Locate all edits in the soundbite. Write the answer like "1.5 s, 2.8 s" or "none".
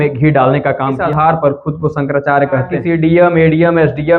0.9 s, 2.7 s